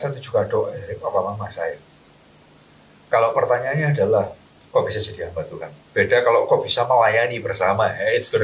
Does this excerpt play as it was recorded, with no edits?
yes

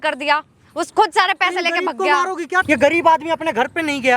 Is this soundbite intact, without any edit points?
no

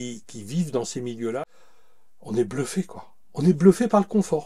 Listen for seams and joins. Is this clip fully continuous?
no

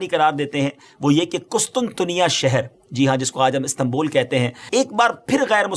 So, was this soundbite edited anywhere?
yes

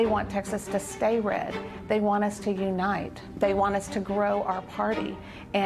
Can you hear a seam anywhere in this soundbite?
yes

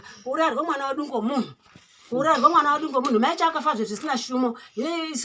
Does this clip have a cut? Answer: no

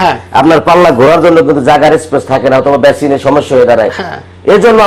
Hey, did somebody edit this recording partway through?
no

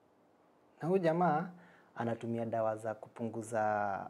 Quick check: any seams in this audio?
no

